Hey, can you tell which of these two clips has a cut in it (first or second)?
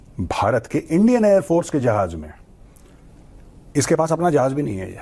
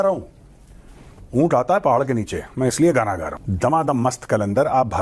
second